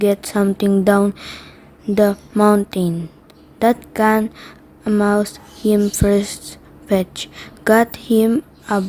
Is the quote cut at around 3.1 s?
no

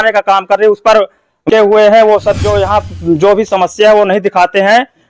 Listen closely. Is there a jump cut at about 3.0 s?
no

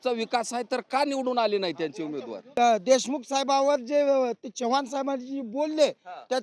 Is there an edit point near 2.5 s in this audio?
yes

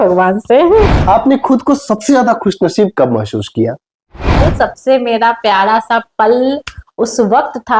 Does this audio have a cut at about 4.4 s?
yes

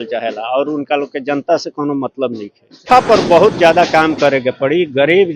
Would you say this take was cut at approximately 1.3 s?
no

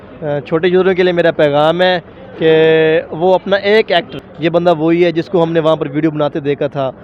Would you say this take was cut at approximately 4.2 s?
yes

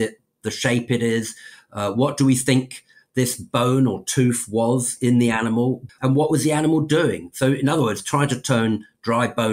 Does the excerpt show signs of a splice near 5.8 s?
yes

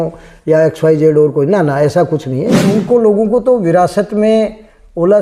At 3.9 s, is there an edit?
no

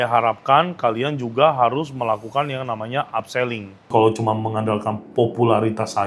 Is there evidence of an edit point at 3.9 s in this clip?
yes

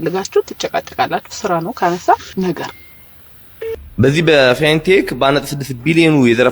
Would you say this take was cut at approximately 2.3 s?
no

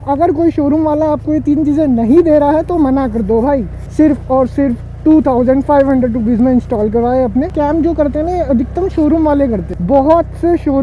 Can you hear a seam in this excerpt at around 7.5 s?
yes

